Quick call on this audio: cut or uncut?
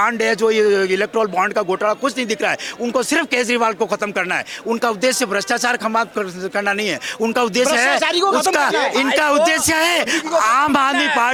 uncut